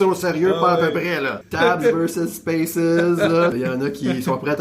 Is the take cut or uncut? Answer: cut